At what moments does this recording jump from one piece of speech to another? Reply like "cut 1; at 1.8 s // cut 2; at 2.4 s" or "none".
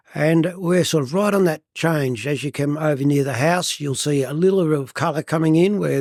none